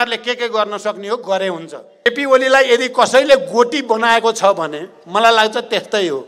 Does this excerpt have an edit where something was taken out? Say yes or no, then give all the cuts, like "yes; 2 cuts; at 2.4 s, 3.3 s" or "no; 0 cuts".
yes; 1 cut; at 2.1 s